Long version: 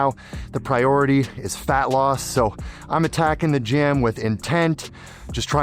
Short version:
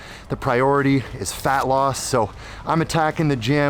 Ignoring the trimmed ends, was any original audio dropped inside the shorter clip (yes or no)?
no